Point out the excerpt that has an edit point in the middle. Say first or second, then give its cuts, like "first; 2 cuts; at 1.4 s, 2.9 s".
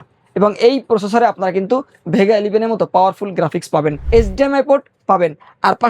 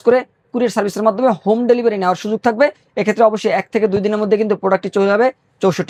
first; 1 cut; at 4.0 s